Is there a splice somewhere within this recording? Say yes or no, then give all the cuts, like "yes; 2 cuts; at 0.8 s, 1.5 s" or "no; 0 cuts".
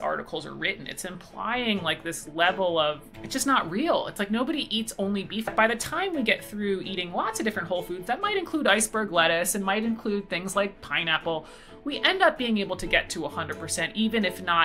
yes; 2 cuts; at 3.1 s, 5.5 s